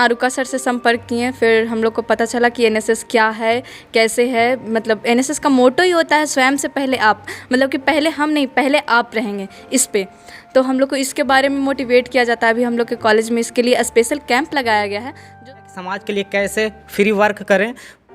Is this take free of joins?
no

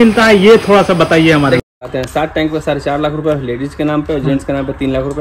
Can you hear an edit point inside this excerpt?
yes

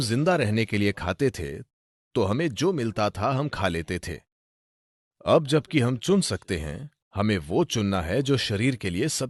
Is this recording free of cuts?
yes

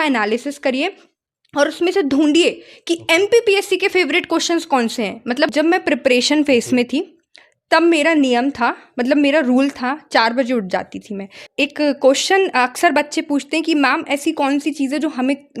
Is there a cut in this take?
yes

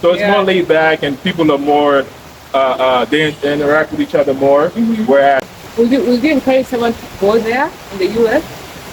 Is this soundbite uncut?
no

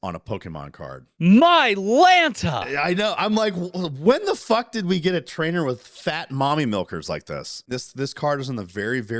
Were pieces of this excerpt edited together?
yes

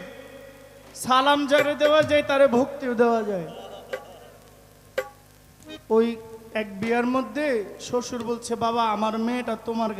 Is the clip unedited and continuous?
yes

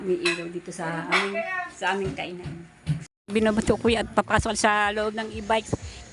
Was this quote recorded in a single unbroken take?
no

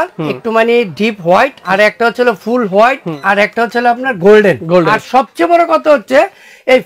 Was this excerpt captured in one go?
no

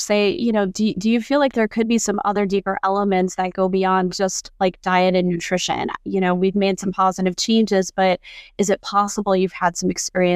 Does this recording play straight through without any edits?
yes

